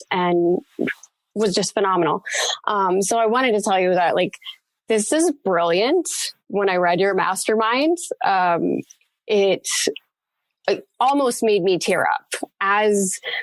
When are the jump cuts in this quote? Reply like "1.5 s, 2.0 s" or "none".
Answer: none